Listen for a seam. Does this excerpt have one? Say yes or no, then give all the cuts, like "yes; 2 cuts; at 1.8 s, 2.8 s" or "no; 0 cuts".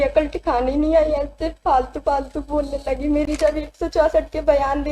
yes; 1 cut; at 3.2 s